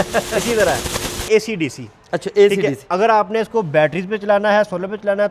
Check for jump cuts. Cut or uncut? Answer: cut